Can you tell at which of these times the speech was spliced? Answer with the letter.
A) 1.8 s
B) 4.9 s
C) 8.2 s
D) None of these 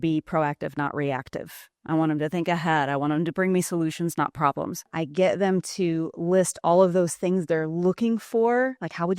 B